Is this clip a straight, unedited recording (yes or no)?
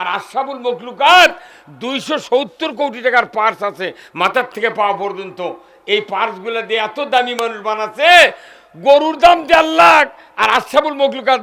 yes